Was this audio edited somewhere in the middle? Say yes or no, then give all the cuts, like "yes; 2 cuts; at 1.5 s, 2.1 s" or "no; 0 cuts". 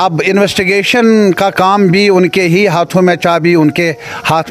no; 0 cuts